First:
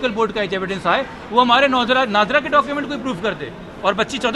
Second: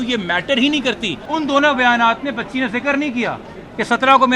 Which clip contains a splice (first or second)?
second